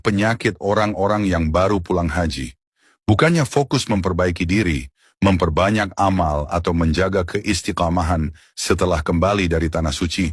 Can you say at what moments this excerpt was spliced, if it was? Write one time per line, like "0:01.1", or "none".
none